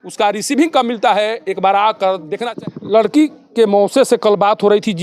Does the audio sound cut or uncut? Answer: cut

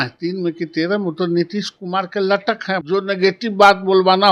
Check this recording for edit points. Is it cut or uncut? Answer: cut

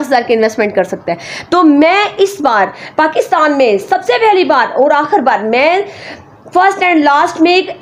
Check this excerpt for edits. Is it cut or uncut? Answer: uncut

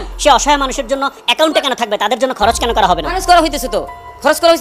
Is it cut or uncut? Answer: uncut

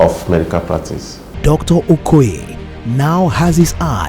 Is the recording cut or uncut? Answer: cut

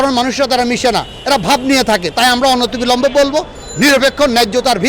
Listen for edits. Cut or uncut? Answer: uncut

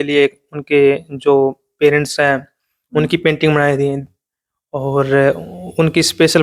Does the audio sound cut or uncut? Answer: uncut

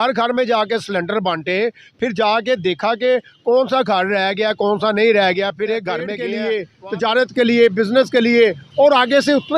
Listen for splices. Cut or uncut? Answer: cut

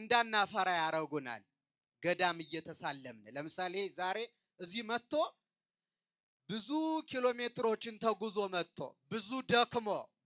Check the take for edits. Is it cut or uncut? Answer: uncut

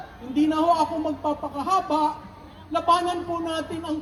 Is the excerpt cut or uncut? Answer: uncut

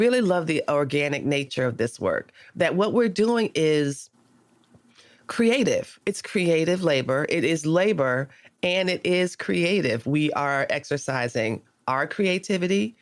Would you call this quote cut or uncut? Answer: cut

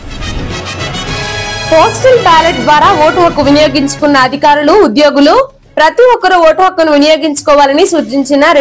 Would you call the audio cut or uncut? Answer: cut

